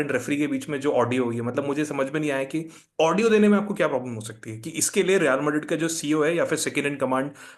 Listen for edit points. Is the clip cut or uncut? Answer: uncut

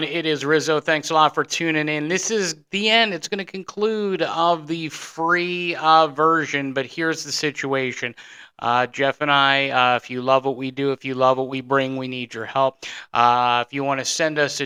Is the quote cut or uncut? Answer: uncut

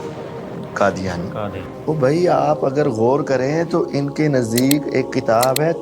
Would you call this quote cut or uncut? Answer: cut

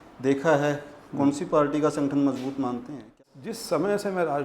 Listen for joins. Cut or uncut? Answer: cut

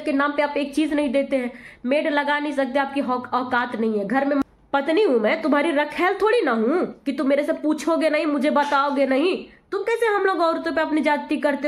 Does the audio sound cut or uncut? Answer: cut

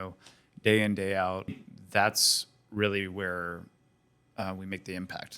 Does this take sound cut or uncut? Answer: cut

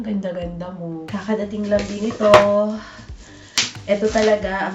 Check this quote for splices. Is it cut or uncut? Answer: cut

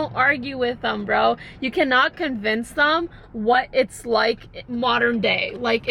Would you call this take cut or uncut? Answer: uncut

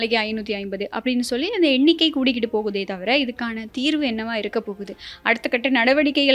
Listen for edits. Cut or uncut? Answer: uncut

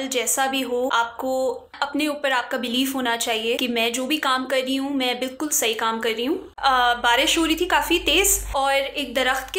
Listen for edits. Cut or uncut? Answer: cut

